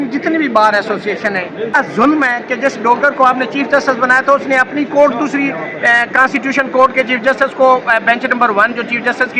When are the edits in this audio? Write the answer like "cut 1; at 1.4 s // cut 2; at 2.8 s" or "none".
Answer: cut 1; at 1.7 s